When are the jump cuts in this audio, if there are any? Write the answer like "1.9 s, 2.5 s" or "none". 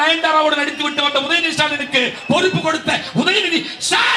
none